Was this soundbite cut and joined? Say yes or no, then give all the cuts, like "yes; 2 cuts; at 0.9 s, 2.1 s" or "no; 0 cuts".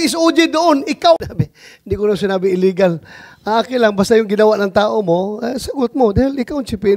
yes; 1 cut; at 1.2 s